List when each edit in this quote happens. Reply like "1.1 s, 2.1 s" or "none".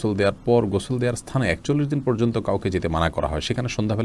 none